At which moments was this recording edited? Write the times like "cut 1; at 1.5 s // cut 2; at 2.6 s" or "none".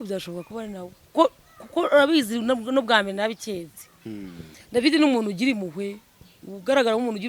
none